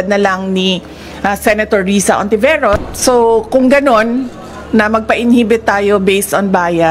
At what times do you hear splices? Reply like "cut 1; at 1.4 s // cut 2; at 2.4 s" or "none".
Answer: cut 1; at 2.8 s